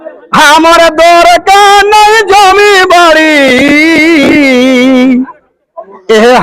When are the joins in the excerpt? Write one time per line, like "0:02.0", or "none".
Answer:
none